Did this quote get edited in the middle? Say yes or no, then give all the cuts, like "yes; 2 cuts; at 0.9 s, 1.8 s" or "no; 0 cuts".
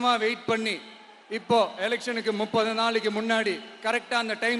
no; 0 cuts